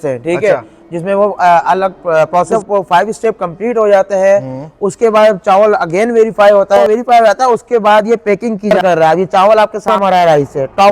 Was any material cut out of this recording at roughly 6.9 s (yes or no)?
yes